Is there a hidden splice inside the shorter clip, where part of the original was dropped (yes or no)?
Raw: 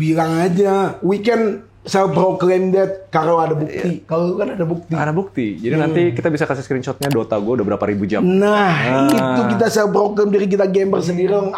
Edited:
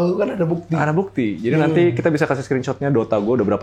no